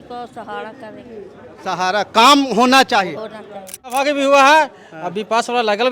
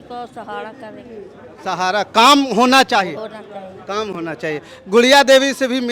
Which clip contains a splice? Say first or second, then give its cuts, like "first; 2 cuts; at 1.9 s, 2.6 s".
first; 1 cut; at 3.9 s